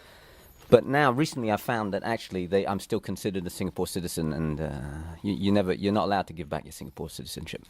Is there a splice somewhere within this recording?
yes; 1 cut; at 4.8 s

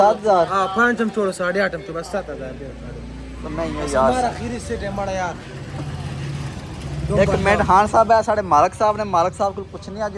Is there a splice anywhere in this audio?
no; 0 cuts

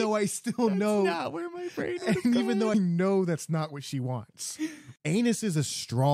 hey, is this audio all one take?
no; 2 cuts; at 2.7 s, 4.9 s

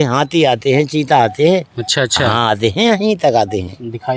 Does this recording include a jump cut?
no; 0 cuts

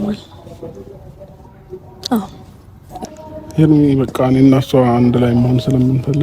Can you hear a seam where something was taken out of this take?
yes; 1 cut; at 3.0 s

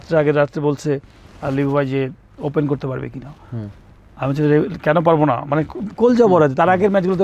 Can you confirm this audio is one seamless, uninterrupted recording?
yes; 0 cuts

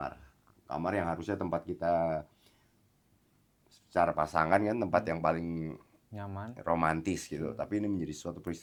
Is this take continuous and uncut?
yes; 0 cuts

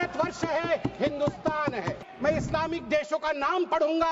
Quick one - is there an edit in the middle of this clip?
yes; 1 cut; at 2.0 s

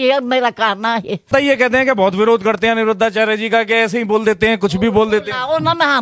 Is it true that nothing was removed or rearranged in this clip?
no; 1 cut; at 1.3 s

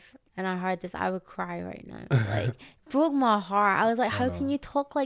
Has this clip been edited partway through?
no; 0 cuts

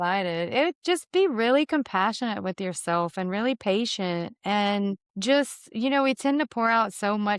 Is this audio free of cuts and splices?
no; 1 cut; at 5.1 s

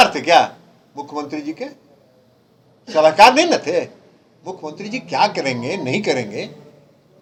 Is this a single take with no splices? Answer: yes; 0 cuts

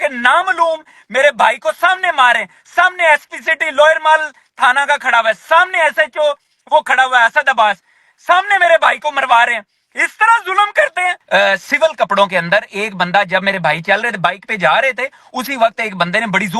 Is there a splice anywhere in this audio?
yes; 1 cut; at 11.2 s

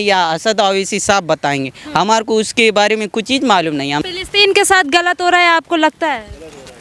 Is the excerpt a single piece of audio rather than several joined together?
no; 1 cut; at 4.1 s

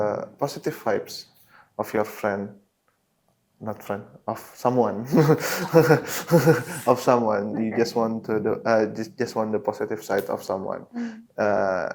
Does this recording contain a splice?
no; 0 cuts

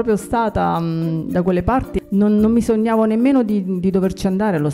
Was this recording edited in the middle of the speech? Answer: yes; 1 cut; at 2.0 s

